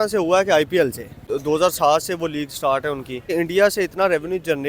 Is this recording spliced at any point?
yes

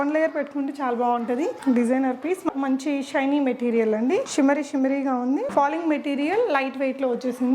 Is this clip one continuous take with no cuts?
no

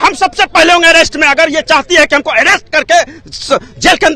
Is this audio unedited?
yes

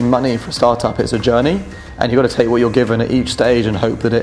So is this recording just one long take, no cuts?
yes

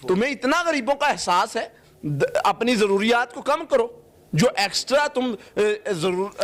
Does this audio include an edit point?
no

